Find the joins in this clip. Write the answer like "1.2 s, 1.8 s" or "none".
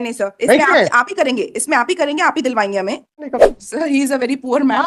3.3 s